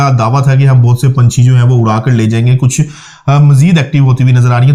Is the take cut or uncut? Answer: uncut